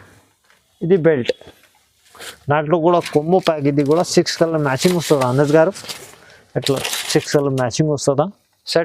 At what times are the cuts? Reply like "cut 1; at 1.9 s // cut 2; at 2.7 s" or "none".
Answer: none